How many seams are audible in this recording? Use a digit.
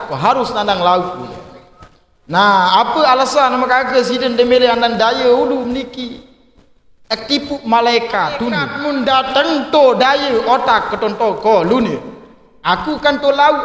1